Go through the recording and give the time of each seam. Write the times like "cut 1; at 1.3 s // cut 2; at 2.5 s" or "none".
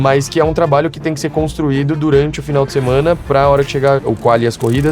none